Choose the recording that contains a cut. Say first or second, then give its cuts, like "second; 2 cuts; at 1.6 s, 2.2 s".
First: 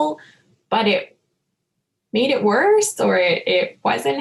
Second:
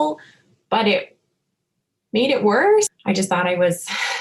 second; 1 cut; at 2.9 s